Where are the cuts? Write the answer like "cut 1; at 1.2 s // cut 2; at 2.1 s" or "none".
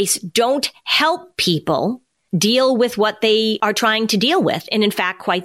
cut 1; at 2.1 s // cut 2; at 3.6 s